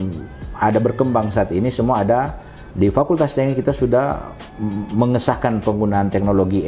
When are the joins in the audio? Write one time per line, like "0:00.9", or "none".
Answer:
none

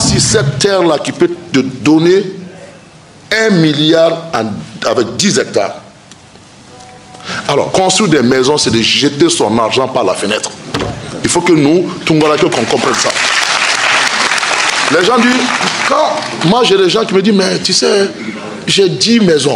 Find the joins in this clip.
0:07.7

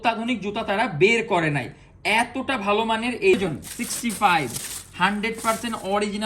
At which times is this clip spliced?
0:03.3

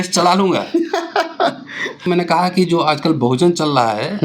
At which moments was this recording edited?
0:02.1

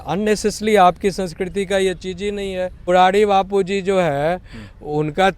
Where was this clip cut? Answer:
0:02.9

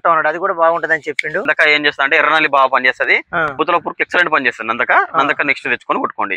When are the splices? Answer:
0:01.4
0:03.5

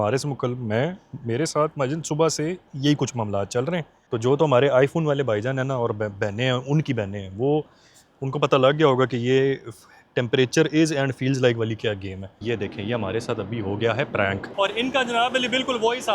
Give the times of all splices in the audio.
0:04.0
0:12.3
0:14.5

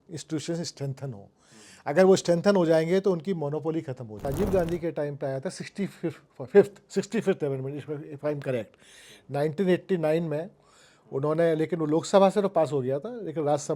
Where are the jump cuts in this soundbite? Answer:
0:04.3

